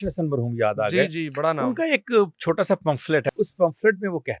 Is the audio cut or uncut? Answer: cut